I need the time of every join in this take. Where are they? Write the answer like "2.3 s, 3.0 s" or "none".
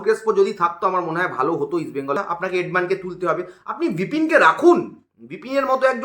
2.2 s